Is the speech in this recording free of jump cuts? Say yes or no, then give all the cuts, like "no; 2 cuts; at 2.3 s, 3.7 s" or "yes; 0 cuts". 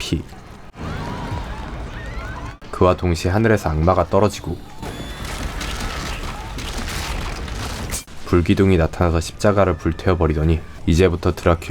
no; 1 cut; at 10.7 s